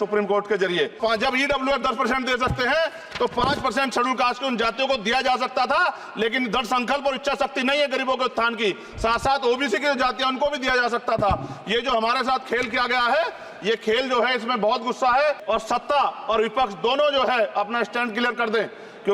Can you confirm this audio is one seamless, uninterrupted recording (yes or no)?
no